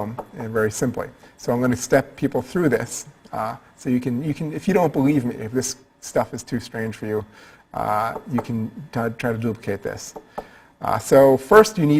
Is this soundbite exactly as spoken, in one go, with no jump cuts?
yes; 0 cuts

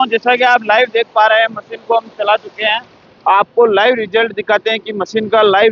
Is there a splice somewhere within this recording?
no; 0 cuts

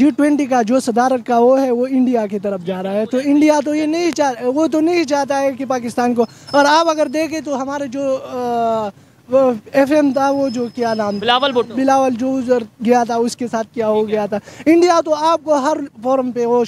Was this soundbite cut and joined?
no; 0 cuts

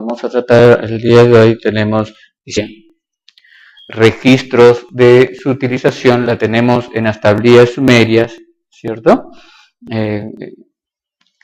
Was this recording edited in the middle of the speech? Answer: no; 0 cuts

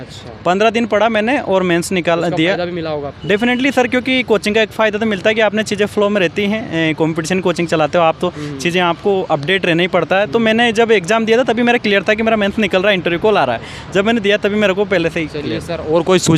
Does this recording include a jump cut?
no; 0 cuts

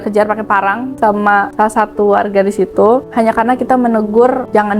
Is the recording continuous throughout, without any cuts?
yes; 0 cuts

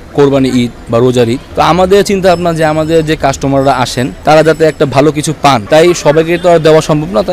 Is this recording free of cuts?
no; 3 cuts; at 1.4 s, 4.1 s, 5.6 s

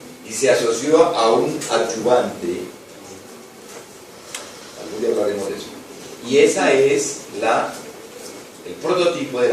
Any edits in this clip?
no; 0 cuts

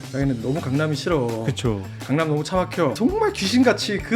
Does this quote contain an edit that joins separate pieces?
yes; 1 cut; at 2.9 s

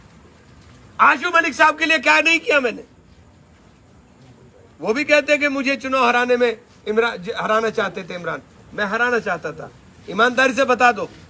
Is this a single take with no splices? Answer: yes; 0 cuts

